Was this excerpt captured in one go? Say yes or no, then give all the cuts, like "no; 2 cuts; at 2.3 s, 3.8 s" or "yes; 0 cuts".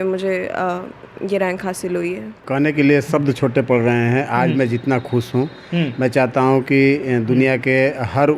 no; 1 cut; at 2.5 s